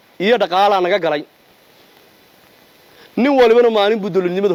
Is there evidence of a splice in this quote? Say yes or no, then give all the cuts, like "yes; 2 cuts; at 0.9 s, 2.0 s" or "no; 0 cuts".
no; 0 cuts